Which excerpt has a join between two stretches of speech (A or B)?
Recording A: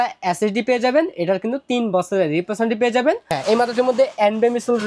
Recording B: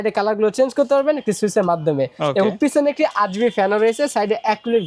A